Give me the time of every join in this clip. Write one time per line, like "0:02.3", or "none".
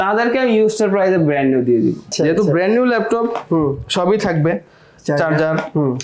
0:02.1